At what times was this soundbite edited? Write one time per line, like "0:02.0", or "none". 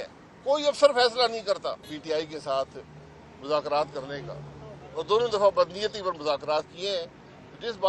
0:01.9

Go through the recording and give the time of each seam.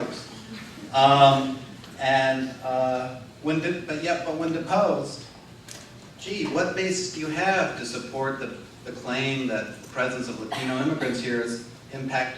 0:03.2

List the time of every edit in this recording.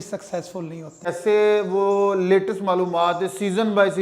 0:01.1

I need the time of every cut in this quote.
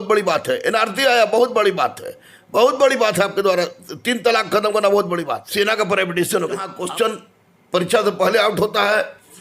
0:05.4
0:06.7

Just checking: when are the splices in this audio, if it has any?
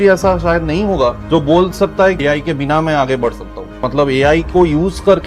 0:01.2
0:02.2
0:03.8

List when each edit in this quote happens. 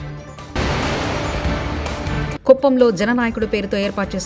none

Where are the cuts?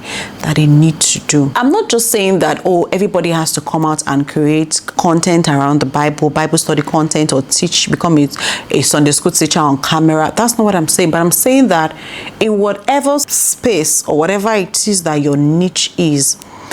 0:01.5
0:05.0
0:13.4

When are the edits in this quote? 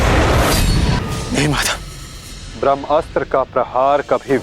0:01.0

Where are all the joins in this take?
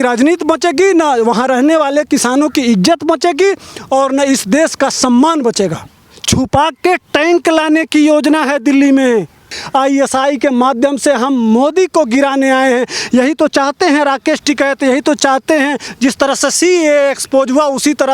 0:05.9
0:09.6
0:15.8

